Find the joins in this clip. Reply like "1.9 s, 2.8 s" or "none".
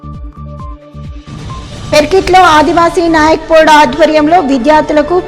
1.9 s